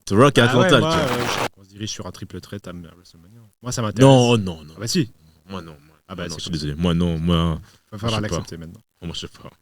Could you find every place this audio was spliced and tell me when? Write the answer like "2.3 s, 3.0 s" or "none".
1.4 s